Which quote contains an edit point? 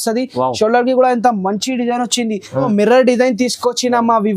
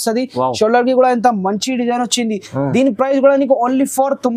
first; 1 cut; at 2.6 s

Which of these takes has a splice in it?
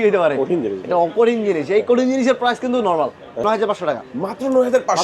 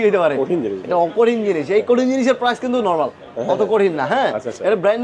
first; 1 cut; at 3.4 s

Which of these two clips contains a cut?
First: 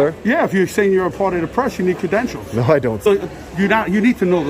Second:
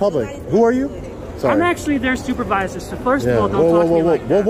first; 1 cut; at 3.0 s

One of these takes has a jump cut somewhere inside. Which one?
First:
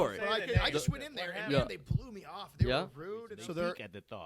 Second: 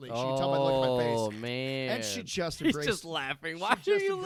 first; 1 cut; at 3.3 s

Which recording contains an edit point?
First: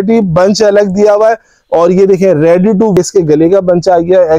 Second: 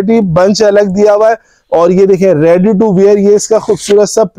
first; 1 cut; at 3.0 s

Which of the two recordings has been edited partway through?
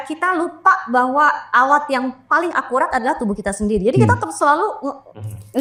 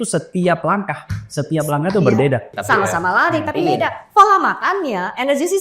second; 1 cut; at 2.5 s

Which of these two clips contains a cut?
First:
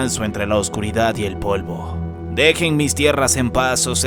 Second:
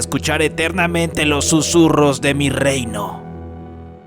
second; 1 cut; at 3.1 s

